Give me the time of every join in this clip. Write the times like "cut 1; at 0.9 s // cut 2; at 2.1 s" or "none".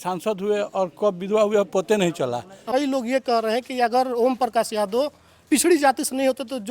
cut 1; at 2.6 s